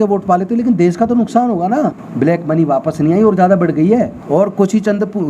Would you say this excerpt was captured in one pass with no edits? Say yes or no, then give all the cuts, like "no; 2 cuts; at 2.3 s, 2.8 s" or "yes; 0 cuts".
no; 2 cuts; at 2.0 s, 4.2 s